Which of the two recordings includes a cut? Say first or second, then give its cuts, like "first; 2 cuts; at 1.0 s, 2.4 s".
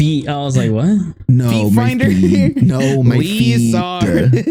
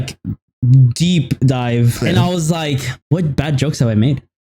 second; 2 cuts; at 2.0 s, 2.9 s